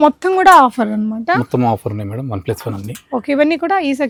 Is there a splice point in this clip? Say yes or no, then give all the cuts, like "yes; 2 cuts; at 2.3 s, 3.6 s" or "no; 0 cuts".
no; 0 cuts